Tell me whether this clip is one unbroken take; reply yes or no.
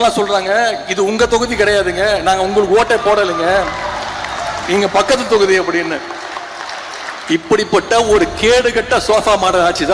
yes